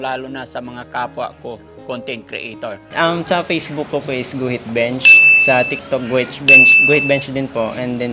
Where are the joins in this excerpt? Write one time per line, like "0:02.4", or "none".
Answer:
0:02.8